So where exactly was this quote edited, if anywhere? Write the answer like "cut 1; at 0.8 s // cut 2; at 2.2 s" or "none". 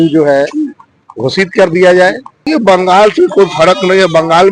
cut 1; at 2.3 s